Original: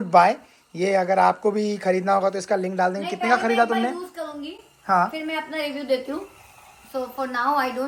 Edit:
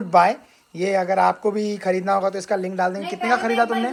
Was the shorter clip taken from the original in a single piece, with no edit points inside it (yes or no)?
yes